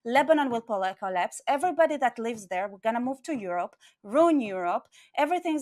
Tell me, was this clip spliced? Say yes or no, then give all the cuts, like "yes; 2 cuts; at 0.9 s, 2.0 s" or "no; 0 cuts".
no; 0 cuts